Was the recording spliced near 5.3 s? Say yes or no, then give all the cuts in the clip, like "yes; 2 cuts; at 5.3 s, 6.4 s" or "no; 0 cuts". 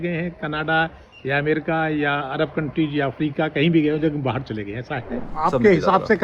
yes; 1 cut; at 5.3 s